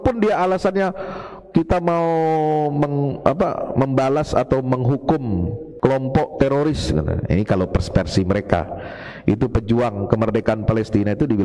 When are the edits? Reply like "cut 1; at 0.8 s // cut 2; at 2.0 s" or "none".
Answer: cut 1; at 5.6 s